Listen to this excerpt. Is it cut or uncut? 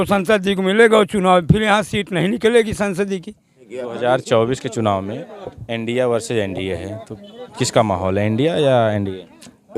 cut